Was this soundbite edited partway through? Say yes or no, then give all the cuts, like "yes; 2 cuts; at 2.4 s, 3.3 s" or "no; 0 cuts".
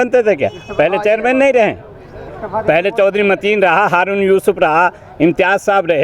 no; 0 cuts